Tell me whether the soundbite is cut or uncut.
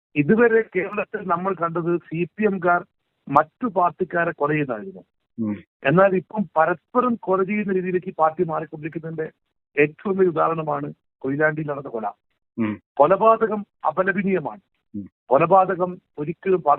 uncut